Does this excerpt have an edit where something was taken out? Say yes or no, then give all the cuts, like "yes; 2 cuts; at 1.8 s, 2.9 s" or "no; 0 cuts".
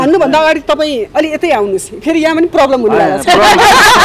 no; 0 cuts